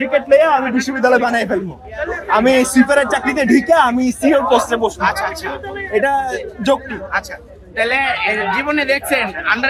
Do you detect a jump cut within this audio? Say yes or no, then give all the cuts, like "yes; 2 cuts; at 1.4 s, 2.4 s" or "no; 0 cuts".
no; 0 cuts